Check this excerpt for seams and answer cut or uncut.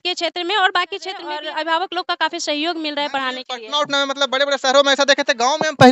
cut